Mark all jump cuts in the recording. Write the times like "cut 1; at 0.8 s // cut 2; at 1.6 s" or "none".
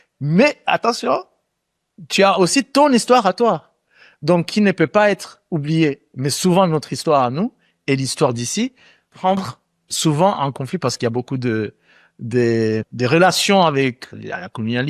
none